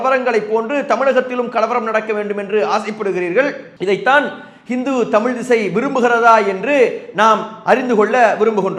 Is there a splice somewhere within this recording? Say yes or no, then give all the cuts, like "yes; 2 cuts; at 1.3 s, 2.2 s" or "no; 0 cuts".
no; 0 cuts